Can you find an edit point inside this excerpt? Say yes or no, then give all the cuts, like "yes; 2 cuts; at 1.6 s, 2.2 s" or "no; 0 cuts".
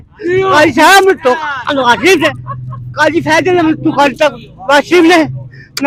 no; 0 cuts